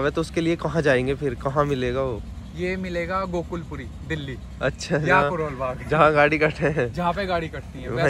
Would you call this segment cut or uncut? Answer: uncut